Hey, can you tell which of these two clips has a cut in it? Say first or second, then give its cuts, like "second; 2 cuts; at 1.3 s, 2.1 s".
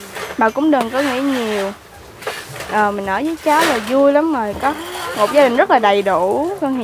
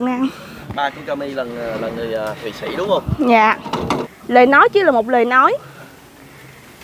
second; 1 cut; at 4.0 s